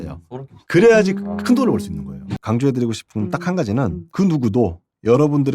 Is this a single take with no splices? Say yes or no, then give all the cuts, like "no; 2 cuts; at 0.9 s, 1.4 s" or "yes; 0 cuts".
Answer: no; 1 cut; at 2.4 s